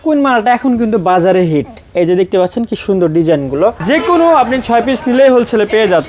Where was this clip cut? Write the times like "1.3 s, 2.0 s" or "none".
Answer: 3.8 s